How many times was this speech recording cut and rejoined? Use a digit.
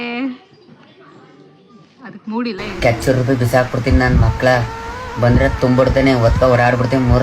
1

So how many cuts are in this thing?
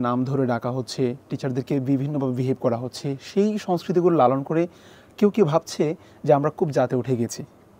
0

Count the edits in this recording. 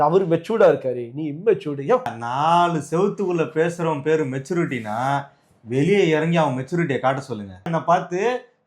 2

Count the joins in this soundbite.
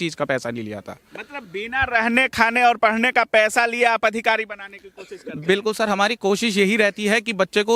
0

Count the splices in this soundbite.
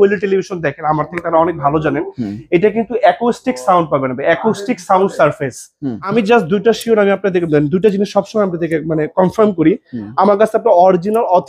1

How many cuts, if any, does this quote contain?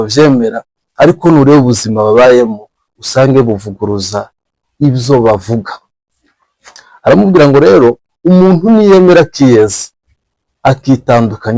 0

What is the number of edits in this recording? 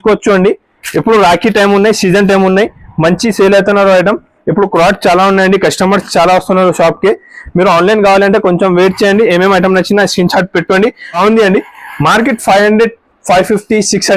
1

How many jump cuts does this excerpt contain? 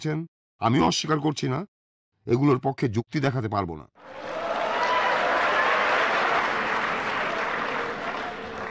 2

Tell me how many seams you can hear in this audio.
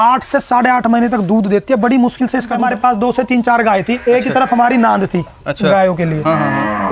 1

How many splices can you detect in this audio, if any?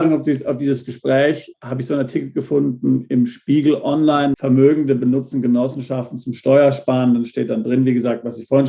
2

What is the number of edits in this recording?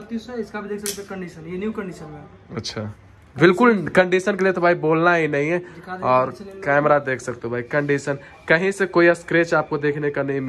0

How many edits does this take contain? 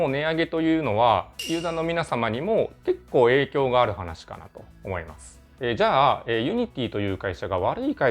0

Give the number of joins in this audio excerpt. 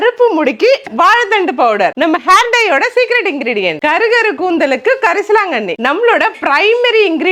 0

